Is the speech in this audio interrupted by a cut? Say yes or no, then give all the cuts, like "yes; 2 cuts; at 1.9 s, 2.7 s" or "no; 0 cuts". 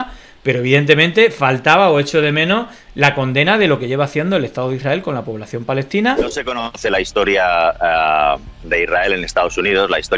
yes; 1 cut; at 6.2 s